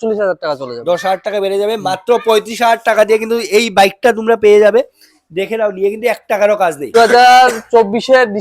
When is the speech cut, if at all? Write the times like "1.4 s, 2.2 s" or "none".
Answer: 6.9 s